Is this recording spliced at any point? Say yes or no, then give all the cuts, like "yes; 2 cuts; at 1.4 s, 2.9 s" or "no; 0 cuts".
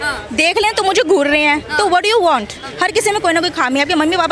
yes; 1 cut; at 2.6 s